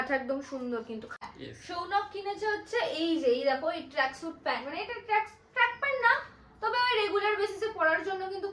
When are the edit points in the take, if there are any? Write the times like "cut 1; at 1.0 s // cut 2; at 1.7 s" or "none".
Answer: cut 1; at 1.2 s